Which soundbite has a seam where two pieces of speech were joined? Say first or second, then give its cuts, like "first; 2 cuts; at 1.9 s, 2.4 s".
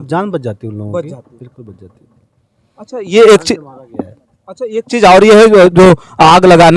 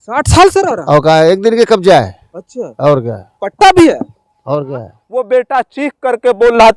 second; 1 cut; at 5.0 s